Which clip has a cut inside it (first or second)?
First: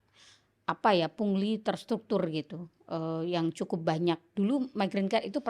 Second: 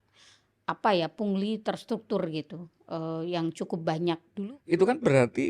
second